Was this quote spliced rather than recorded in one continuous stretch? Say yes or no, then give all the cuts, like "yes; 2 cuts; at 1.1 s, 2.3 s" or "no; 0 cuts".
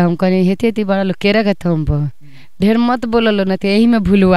no; 0 cuts